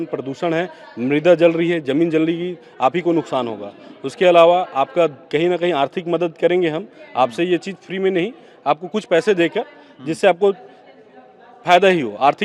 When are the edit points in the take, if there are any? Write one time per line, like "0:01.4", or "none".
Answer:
none